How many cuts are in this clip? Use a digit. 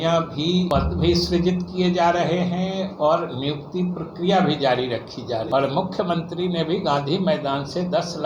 1